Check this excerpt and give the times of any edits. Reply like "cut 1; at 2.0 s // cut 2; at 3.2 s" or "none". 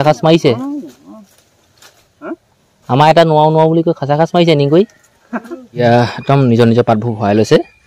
cut 1; at 5.8 s